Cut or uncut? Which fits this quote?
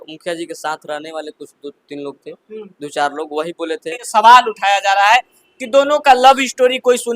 cut